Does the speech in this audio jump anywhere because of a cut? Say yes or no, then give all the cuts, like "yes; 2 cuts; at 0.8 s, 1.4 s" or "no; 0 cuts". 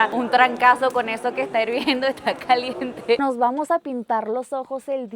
yes; 1 cut; at 3.2 s